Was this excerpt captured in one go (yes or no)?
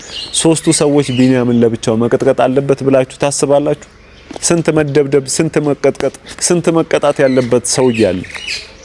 yes